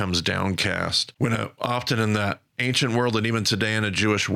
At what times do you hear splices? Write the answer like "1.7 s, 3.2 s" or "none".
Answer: 1.0 s